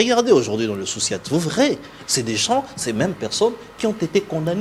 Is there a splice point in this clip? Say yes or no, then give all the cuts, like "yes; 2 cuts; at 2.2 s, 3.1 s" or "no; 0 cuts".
no; 0 cuts